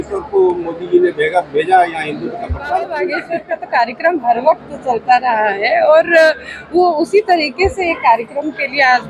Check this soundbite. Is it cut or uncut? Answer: cut